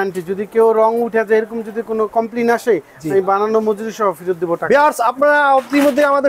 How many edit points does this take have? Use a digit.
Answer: 0